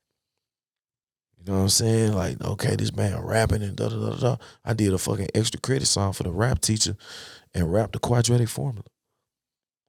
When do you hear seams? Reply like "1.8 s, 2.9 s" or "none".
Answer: none